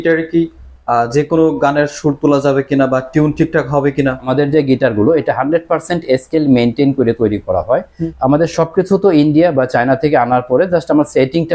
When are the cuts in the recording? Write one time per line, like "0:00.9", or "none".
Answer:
0:04.3
0:08.0